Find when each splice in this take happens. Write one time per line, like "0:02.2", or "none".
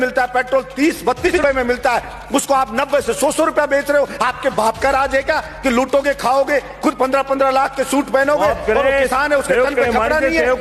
0:01.3